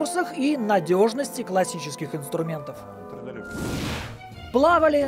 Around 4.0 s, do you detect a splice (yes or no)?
yes